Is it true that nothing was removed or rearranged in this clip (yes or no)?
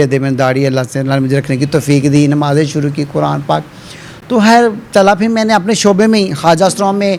yes